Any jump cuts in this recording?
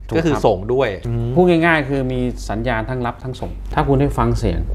yes; 2 cuts; at 1.1 s, 3.6 s

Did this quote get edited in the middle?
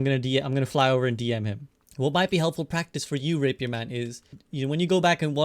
yes; 2 cuts; at 1.9 s, 4.4 s

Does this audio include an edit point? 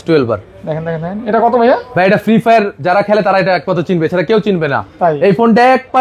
no; 0 cuts

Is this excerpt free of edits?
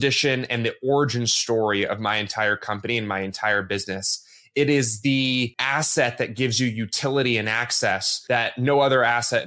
no; 2 cuts; at 5.6 s, 8.1 s

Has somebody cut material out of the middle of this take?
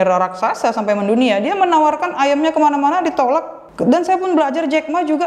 yes; 1 cut; at 3.6 s

